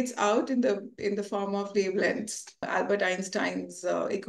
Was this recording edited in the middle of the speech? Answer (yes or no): yes